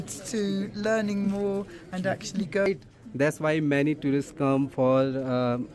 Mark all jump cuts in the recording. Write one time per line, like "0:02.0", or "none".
0:02.7